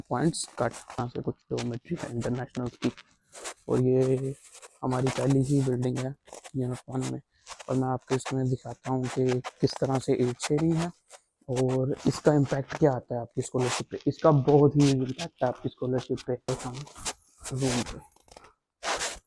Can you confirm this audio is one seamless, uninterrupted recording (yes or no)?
yes